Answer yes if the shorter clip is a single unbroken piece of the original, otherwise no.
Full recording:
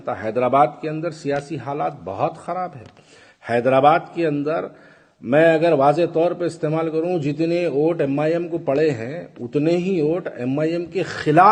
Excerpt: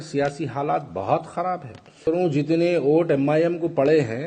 no